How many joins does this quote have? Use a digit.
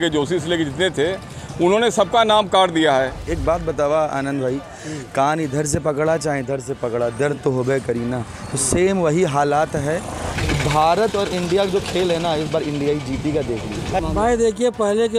3